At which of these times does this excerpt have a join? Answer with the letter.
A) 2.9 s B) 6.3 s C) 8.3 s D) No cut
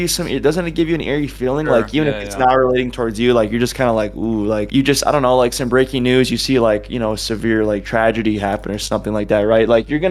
D